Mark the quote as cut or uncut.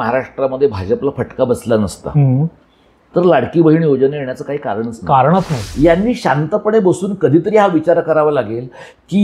cut